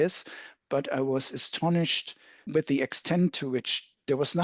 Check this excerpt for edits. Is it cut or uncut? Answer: cut